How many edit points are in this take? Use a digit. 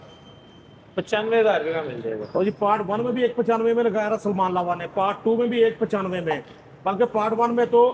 0